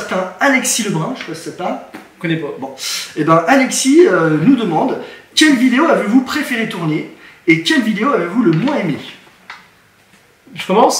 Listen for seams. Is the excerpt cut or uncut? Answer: uncut